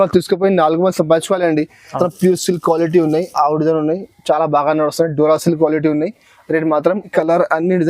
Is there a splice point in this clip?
yes; 2 cuts; at 2.0 s, 7.1 s

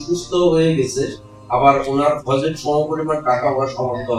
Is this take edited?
no; 0 cuts

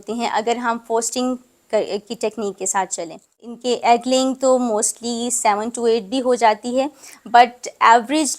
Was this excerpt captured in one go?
no; 1 cut; at 3.5 s

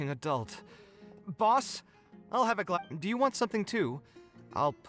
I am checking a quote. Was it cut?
yes; 1 cut; at 2.8 s

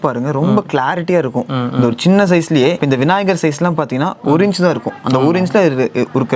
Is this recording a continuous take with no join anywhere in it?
yes; 0 cuts

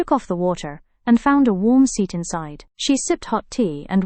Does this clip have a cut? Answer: no; 0 cuts

